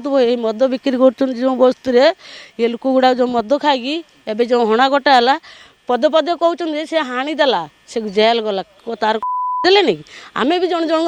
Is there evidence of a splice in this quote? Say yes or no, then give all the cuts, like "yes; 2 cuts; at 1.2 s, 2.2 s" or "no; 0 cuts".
no; 0 cuts